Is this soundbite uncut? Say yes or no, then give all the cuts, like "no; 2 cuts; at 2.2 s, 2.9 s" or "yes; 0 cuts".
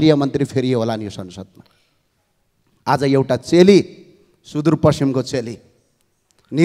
yes; 0 cuts